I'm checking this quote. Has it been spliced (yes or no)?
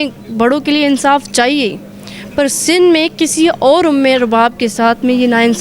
no